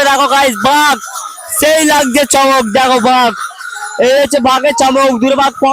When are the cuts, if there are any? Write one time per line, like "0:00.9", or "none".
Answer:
none

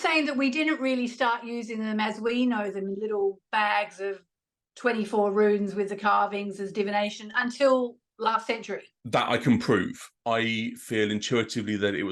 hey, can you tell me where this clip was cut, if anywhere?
none

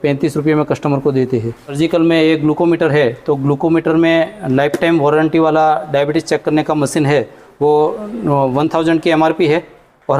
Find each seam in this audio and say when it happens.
0:01.6

